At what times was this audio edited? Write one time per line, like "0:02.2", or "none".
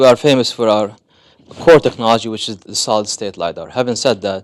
0:01.6